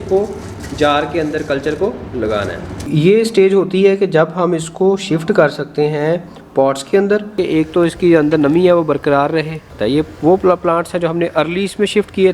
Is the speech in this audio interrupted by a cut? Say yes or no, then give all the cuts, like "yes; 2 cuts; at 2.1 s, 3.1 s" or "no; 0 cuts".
yes; 3 cuts; at 2.9 s, 7.4 s, 9.7 s